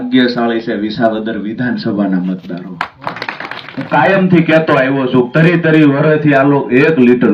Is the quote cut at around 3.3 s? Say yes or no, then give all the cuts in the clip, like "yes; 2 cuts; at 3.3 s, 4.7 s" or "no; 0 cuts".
yes; 1 cut; at 3.3 s